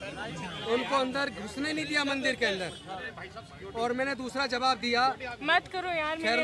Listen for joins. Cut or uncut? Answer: uncut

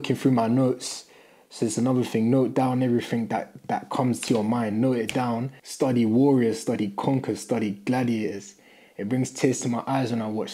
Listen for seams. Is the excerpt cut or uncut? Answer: cut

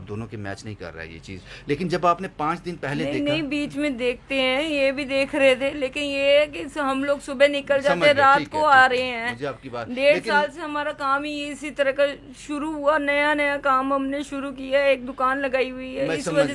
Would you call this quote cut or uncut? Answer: uncut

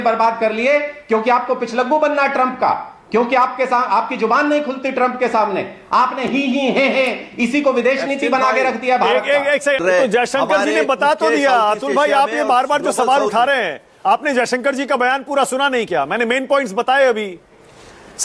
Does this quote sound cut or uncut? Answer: cut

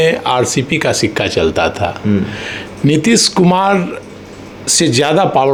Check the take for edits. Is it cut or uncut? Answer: uncut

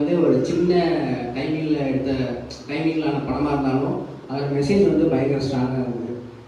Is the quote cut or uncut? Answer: uncut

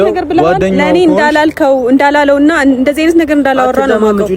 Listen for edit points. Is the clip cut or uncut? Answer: uncut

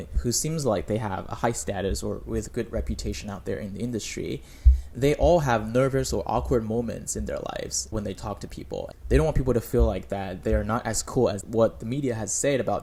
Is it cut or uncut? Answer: uncut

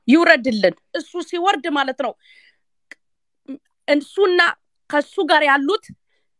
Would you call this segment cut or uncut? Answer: cut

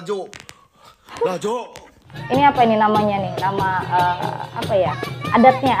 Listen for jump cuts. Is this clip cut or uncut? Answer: cut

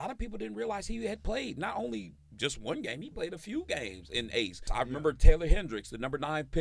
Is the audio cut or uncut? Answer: cut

